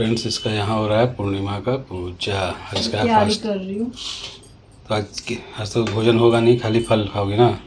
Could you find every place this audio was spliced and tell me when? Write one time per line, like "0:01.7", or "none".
none